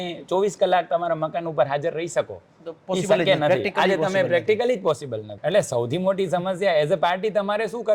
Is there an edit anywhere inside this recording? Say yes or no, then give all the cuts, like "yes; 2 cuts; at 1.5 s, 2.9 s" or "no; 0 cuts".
yes; 1 cut; at 5.3 s